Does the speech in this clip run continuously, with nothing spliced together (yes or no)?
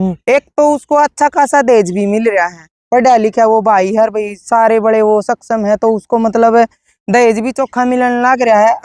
yes